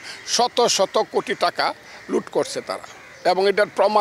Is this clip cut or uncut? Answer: uncut